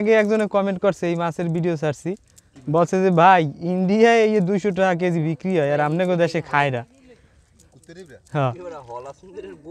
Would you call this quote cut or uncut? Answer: uncut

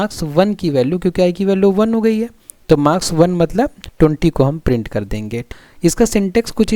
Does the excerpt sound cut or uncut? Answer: cut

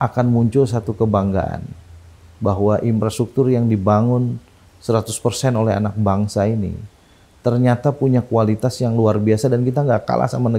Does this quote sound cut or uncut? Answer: uncut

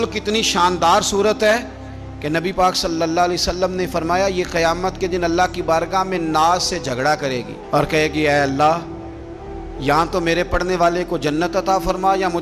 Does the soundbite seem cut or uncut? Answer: uncut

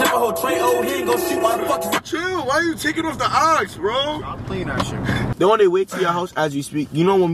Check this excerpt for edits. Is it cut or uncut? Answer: cut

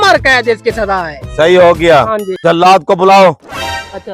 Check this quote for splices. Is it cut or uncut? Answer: cut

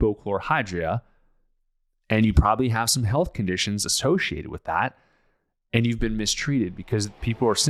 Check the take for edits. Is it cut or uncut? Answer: uncut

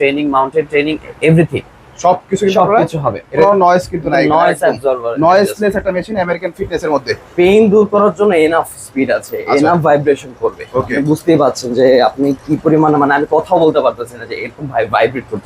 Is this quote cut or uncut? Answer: cut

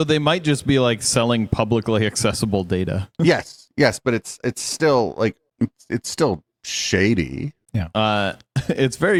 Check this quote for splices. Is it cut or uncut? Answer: uncut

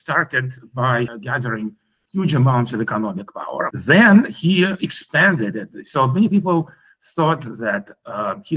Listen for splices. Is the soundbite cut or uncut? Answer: cut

